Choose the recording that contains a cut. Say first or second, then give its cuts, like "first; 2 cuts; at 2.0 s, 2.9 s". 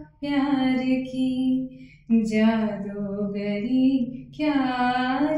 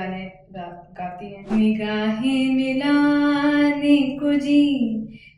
second; 1 cut; at 1.4 s